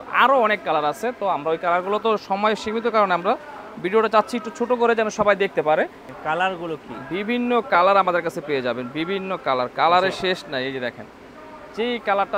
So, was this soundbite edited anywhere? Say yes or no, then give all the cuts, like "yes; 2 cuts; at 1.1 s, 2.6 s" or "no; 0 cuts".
yes; 1 cut; at 6.1 s